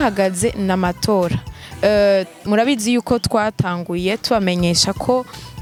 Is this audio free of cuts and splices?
yes; 0 cuts

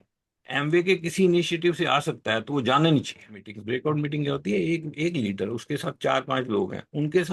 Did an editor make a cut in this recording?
yes; 1 cut; at 3.5 s

